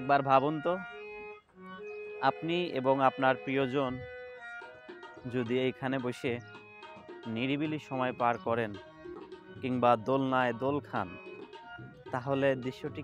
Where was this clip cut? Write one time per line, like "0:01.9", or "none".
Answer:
0:00.8
0:02.2